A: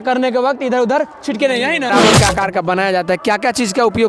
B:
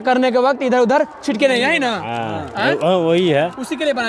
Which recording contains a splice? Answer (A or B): A